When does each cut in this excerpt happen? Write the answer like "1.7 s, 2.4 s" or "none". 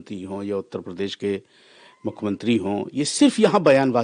none